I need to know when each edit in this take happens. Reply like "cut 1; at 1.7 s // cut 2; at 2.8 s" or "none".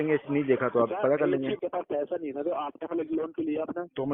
cut 1; at 1.6 s